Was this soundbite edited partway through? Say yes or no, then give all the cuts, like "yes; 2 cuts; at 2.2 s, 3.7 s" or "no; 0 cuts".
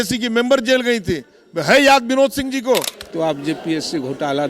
yes; 1 cut; at 3.0 s